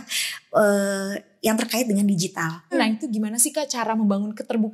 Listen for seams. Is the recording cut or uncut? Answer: cut